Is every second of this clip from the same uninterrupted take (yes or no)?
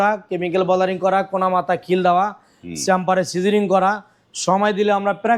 yes